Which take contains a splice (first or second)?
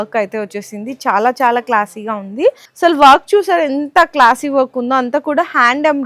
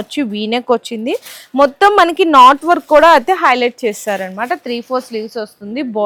first